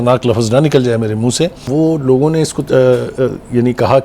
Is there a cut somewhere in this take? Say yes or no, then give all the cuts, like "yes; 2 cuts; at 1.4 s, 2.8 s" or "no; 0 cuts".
yes; 1 cut; at 1.7 s